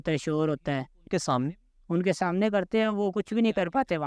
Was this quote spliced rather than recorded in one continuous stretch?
no; 0 cuts

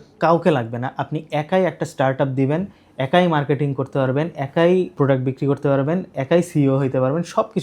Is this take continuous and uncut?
yes; 0 cuts

